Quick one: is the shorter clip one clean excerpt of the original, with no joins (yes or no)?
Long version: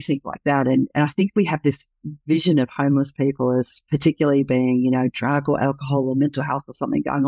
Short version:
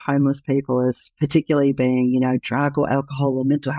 yes